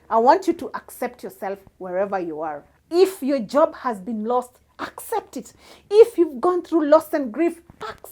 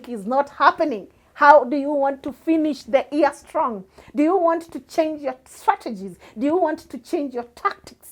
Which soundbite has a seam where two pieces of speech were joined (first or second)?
first